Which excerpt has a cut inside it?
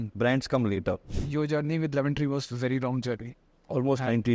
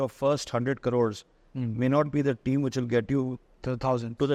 first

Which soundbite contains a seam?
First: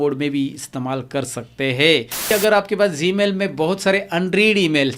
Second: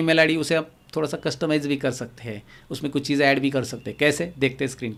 first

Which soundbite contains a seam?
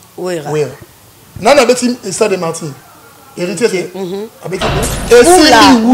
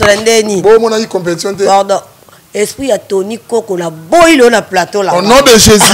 first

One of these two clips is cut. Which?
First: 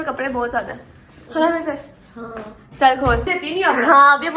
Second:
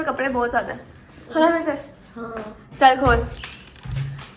first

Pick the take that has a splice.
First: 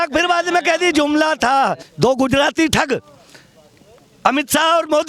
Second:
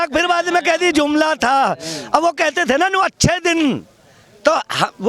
first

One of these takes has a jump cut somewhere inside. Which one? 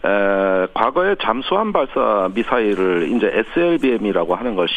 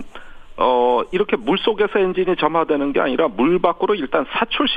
first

